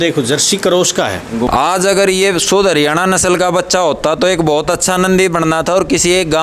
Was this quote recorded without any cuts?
no; 1 cut; at 1.5 s

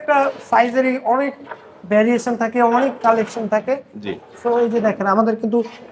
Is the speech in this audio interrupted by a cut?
no; 0 cuts

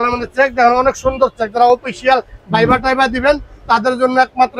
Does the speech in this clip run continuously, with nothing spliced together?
yes; 0 cuts

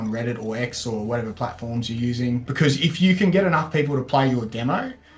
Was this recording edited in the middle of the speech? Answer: yes; 1 cut; at 2.5 s

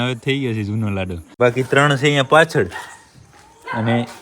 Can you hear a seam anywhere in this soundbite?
yes; 1 cut; at 1.3 s

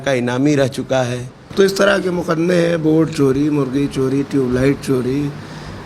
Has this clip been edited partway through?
yes; 1 cut; at 1.4 s

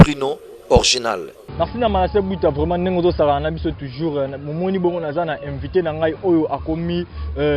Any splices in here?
no; 0 cuts

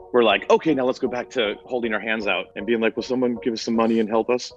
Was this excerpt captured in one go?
no; 2 cuts; at 1.6 s, 2.5 s

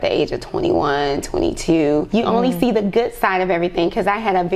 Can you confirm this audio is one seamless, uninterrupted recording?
no; 1 cut; at 2.1 s

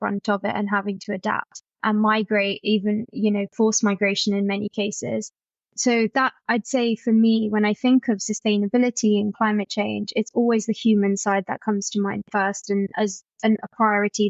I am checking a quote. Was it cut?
no; 0 cuts

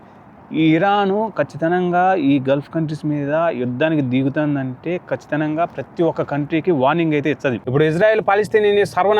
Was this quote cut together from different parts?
yes; 1 cut; at 7.6 s

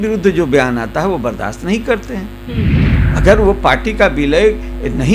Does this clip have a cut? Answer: yes; 1 cut; at 2.7 s

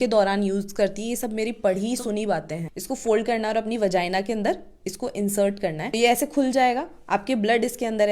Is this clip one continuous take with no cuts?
no; 1 cut; at 2.6 s

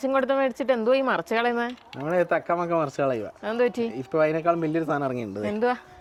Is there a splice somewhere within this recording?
no; 0 cuts

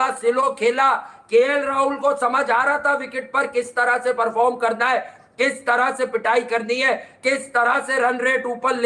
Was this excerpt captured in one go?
yes; 0 cuts

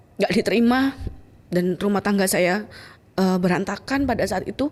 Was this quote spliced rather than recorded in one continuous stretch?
no; 0 cuts

